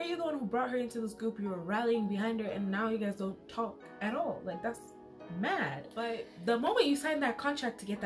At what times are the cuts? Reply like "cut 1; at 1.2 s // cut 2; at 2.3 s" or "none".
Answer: cut 1; at 6.3 s